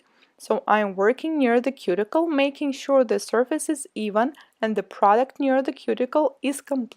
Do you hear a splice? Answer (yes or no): yes